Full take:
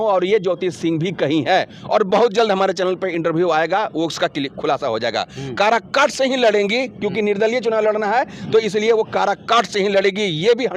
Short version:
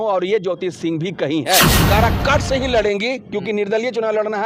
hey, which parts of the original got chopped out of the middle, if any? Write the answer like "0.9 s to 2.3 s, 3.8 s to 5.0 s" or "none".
1.8 s to 5.4 s